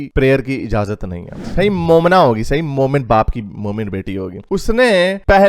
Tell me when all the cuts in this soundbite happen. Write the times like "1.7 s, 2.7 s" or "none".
1.4 s